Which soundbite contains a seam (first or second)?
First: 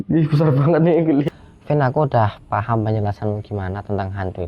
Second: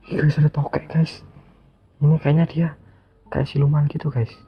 first